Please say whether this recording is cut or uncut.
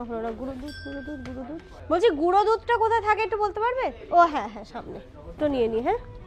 uncut